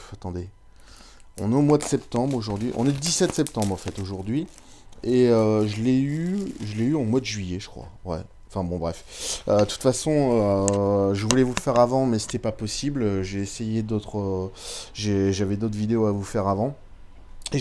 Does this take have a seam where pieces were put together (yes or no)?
no